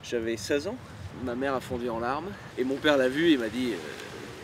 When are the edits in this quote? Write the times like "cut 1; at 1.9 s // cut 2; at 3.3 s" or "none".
cut 1; at 1.1 s // cut 2; at 2.4 s

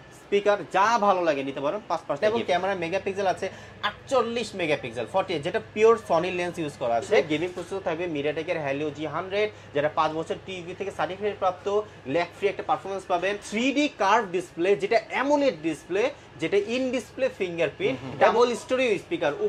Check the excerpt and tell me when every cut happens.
cut 1; at 2.2 s // cut 2; at 7.2 s // cut 3; at 13.4 s // cut 4; at 18.3 s

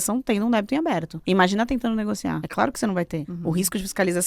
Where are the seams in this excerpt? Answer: cut 1; at 1.1 s // cut 2; at 2.4 s // cut 3; at 3.3 s

